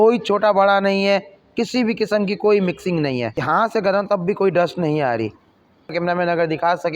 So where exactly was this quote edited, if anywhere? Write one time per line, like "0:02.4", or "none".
0:03.4
0:05.9